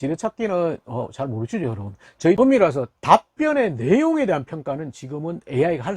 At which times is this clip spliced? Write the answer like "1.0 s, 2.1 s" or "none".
2.4 s